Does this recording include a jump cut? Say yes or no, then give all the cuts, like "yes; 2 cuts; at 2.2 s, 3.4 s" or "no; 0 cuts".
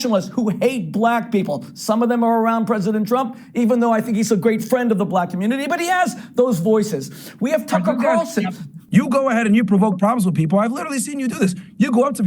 yes; 1 cut; at 8.8 s